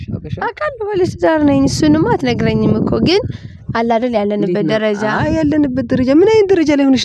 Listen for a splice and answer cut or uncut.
uncut